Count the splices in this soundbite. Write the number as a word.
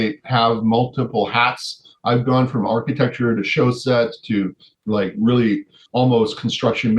two